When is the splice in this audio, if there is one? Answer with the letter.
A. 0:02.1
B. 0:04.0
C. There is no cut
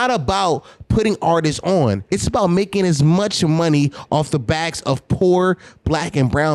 A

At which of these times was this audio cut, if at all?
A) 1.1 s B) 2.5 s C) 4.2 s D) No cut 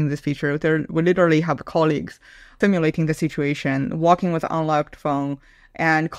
B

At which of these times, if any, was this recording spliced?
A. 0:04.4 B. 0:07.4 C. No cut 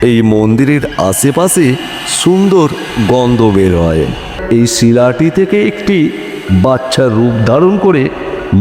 A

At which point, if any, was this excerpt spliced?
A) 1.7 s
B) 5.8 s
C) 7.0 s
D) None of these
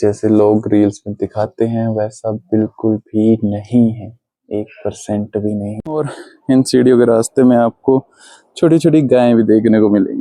B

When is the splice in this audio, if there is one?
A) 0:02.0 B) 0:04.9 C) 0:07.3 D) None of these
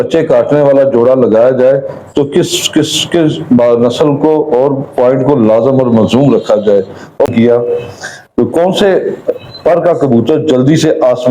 C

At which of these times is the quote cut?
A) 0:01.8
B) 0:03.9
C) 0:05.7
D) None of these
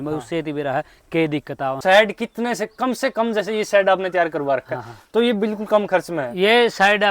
A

